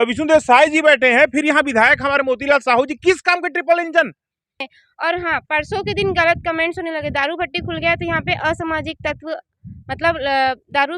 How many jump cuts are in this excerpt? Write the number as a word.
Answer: one